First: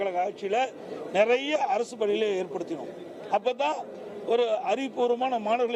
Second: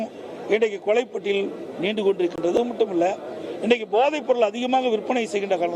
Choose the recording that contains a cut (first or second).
second